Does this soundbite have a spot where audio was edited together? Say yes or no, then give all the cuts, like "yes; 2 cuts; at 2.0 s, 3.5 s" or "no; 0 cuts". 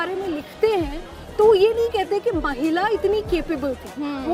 no; 0 cuts